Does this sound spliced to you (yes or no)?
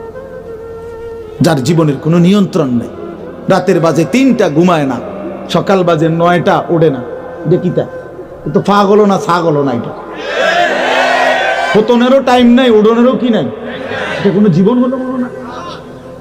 yes